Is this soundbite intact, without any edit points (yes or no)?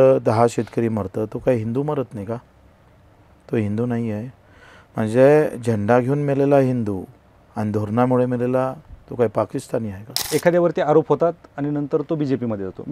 no